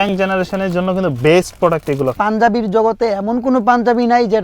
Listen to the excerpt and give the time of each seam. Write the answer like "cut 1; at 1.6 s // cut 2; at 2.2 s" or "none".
cut 1; at 2.2 s